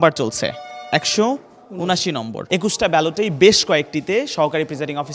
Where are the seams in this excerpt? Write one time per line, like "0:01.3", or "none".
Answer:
0:02.4